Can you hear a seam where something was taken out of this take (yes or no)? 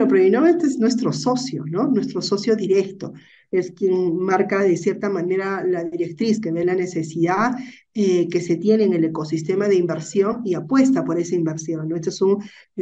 no